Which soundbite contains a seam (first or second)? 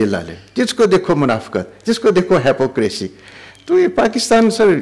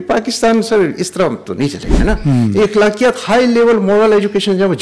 second